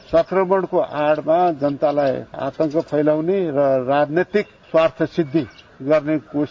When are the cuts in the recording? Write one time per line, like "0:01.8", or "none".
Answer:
0:04.6